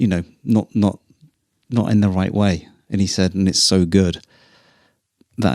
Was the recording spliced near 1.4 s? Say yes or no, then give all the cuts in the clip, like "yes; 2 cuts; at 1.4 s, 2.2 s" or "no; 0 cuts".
no; 0 cuts